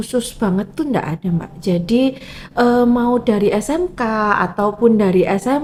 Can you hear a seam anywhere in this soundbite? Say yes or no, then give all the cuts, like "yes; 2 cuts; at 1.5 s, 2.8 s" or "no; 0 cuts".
no; 0 cuts